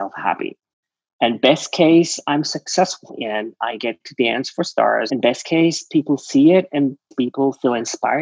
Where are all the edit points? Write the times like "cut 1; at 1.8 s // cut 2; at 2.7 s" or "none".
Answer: cut 1; at 3.1 s // cut 2; at 5.1 s // cut 3; at 7.1 s